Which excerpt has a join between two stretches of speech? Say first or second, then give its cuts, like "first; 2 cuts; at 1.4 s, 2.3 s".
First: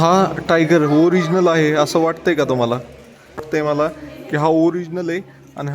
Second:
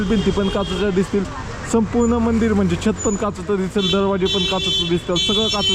first; 1 cut; at 3.5 s